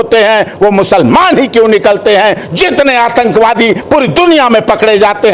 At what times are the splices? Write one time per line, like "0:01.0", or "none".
none

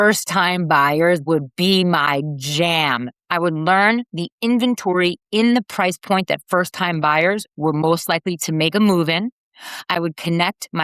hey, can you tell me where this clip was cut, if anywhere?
0:03.1

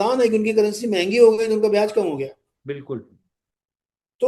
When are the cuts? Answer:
none

